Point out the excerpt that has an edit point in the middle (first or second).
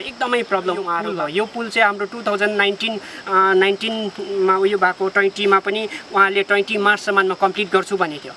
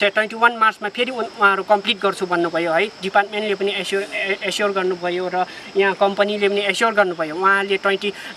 first